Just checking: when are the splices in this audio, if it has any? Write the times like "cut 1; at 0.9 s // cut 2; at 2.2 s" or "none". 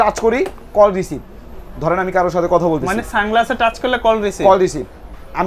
none